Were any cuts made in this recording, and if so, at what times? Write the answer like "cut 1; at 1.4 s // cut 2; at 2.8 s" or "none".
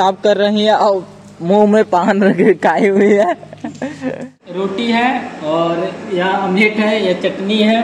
cut 1; at 4.3 s